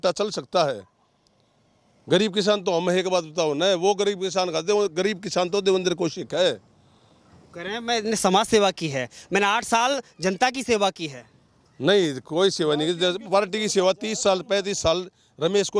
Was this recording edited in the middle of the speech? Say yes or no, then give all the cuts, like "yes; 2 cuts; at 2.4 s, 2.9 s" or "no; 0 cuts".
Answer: no; 0 cuts